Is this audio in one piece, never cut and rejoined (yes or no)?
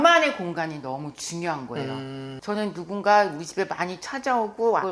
yes